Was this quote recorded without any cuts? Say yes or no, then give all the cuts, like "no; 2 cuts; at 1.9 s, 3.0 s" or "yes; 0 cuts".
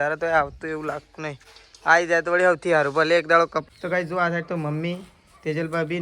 no; 1 cut; at 3.7 s